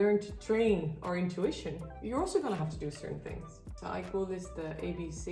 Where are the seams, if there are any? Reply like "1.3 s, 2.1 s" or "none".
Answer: 3.6 s